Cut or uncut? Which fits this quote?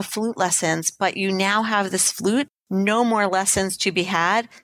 cut